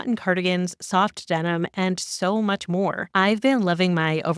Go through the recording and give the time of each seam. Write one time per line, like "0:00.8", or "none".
0:03.0